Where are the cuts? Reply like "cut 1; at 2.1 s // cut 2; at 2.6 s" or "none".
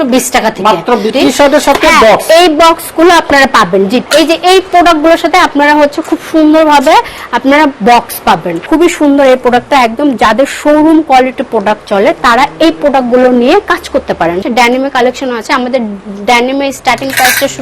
cut 1; at 1.1 s // cut 2; at 4.0 s // cut 3; at 8.5 s // cut 4; at 14.4 s